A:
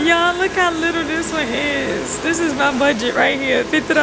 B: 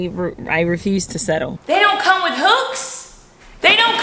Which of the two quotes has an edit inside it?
B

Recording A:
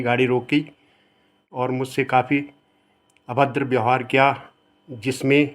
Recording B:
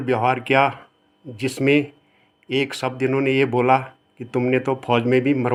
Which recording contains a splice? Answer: A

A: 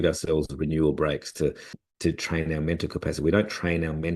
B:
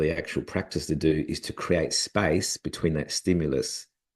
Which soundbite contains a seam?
A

